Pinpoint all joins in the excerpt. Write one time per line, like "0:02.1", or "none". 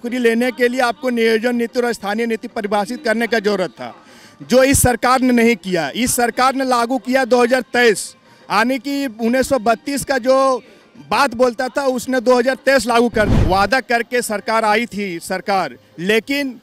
0:13.3